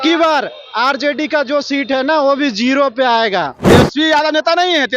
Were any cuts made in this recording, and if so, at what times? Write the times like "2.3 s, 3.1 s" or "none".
3.6 s